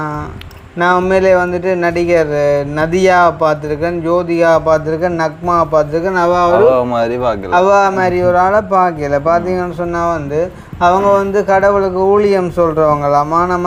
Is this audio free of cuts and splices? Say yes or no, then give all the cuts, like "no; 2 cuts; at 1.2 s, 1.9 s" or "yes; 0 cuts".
yes; 0 cuts